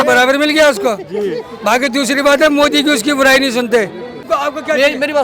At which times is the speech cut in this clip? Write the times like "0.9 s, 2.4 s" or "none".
4.3 s